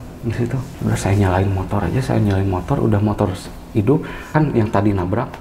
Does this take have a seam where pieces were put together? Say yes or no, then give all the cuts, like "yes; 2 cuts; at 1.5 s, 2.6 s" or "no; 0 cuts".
no; 0 cuts